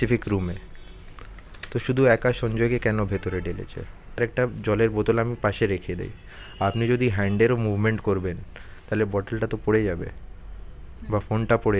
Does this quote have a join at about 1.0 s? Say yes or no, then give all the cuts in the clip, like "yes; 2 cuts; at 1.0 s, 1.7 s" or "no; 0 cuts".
no; 1 cut; at 4.2 s